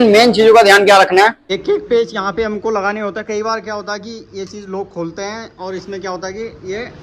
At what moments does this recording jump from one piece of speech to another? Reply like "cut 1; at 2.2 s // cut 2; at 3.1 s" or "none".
cut 1; at 1.5 s